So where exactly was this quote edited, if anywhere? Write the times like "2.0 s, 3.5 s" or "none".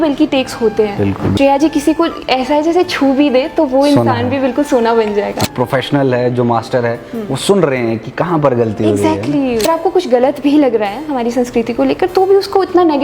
1.3 s, 5.4 s, 9.6 s